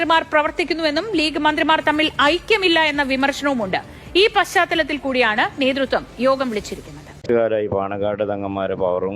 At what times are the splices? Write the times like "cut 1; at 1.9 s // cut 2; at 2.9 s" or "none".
cut 1; at 7.2 s